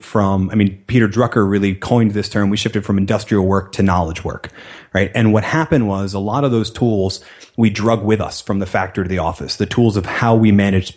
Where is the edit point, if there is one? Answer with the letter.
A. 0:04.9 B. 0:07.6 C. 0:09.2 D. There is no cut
D